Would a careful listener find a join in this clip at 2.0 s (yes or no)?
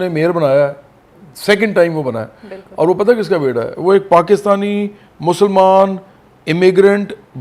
no